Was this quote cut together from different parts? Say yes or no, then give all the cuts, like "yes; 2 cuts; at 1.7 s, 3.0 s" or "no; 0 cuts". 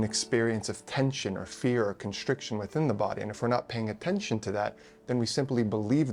no; 0 cuts